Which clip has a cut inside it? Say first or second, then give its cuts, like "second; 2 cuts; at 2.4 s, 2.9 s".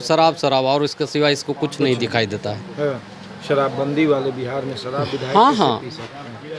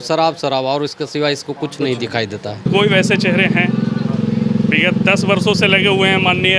second; 1 cut; at 2.6 s